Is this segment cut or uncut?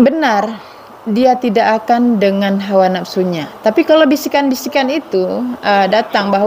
uncut